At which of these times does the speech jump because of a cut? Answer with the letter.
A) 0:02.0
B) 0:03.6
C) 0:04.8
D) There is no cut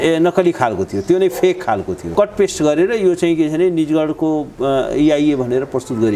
A